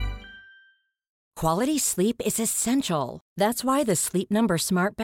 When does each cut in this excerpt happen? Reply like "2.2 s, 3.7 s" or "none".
1.2 s